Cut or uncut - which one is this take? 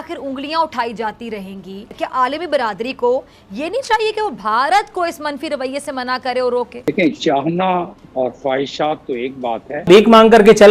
cut